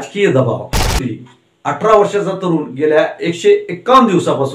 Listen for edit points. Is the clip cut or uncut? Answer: cut